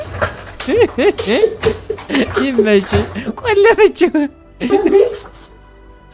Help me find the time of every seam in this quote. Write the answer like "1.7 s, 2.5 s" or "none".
4.6 s